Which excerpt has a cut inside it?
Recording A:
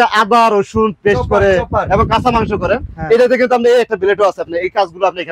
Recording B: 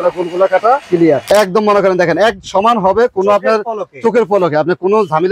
B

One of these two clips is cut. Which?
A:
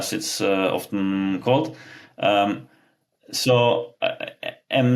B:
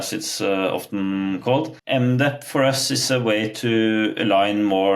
B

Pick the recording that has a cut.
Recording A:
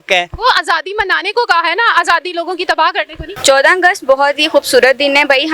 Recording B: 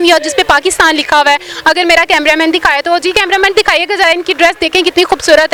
A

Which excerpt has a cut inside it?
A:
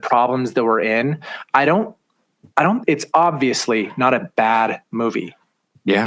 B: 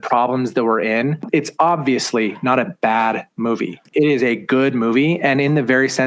B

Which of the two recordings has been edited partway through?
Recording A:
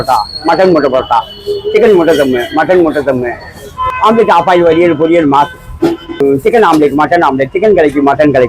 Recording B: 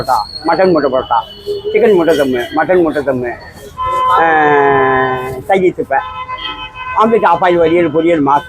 A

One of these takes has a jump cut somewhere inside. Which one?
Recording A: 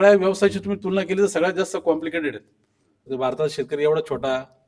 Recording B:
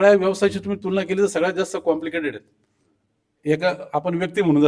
A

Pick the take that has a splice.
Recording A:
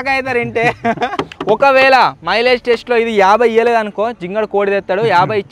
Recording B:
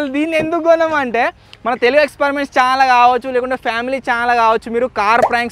A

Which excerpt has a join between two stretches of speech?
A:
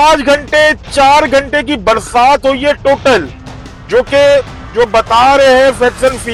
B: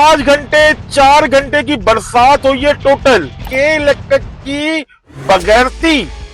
B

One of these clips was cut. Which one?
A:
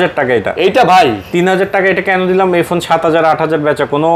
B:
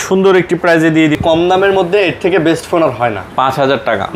B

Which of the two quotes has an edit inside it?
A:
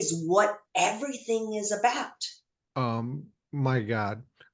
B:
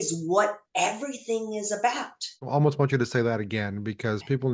B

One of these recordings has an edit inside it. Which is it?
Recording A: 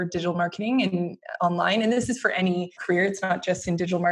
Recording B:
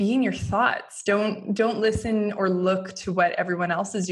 A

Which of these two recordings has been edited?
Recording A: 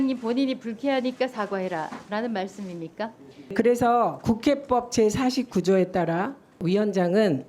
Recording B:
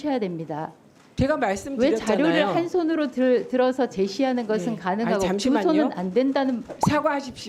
A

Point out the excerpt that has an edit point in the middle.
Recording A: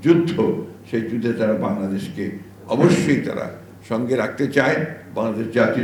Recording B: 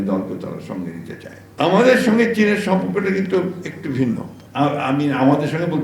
B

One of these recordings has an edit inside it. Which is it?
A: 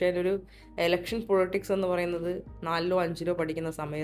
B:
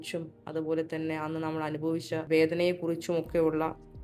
B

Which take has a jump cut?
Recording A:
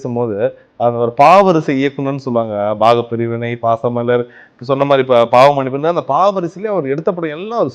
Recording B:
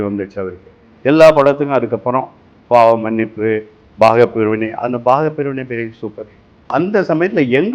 B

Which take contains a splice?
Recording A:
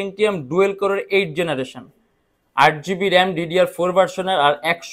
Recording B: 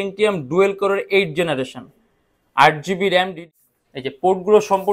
B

